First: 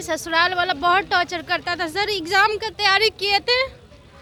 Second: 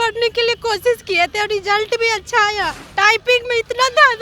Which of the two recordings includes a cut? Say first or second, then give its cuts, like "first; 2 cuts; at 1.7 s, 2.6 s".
second; 1 cut; at 2.8 s